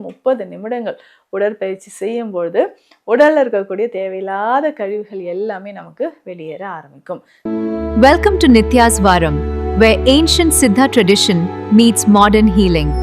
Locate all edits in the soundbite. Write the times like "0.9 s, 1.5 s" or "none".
7.3 s